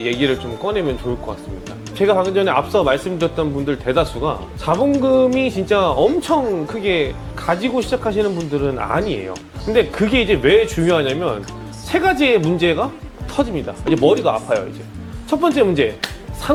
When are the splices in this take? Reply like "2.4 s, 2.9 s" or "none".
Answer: none